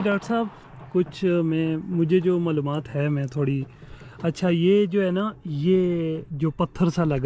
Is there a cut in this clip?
no; 0 cuts

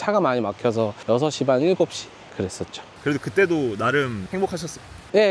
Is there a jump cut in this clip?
no; 0 cuts

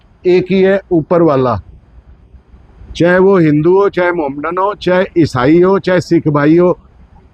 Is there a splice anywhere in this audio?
no; 0 cuts

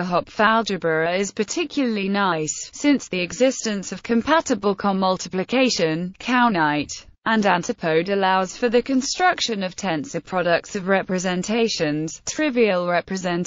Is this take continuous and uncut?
no; 1 cut; at 11.9 s

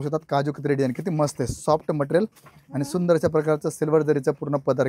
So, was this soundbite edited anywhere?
no; 0 cuts

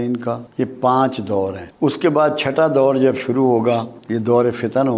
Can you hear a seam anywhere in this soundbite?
yes; 1 cut; at 4.0 s

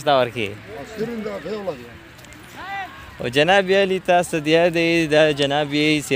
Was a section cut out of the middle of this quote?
no; 0 cuts

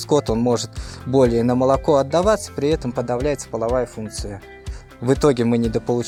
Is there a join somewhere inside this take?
no; 0 cuts

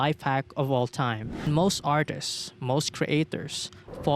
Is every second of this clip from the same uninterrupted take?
no; 1 cut; at 1.5 s

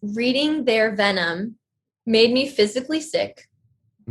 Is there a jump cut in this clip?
no; 0 cuts

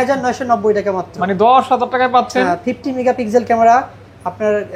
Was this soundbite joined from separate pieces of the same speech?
no; 0 cuts

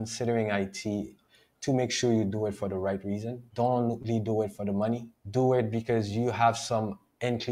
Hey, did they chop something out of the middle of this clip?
no; 0 cuts

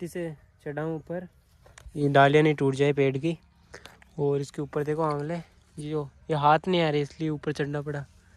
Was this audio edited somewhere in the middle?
no; 0 cuts

